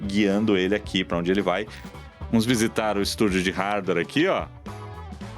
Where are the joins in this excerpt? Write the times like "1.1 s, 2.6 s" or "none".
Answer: 1.8 s